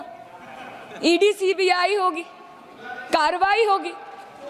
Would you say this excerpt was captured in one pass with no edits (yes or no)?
yes